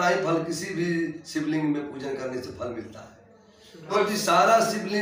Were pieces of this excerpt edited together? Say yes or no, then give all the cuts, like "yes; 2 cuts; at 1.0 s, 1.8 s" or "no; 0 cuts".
yes; 1 cut; at 3.9 s